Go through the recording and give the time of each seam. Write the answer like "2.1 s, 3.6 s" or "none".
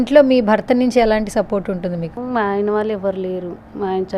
2.1 s